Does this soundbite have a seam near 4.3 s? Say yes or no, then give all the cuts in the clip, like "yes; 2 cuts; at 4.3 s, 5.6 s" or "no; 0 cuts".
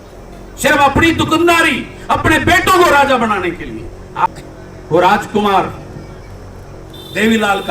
yes; 1 cut; at 4.3 s